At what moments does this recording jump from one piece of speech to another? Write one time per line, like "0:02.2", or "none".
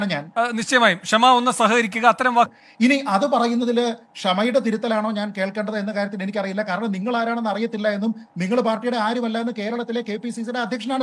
0:02.5